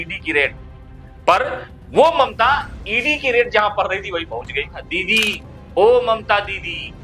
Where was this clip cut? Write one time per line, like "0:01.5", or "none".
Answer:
0:04.8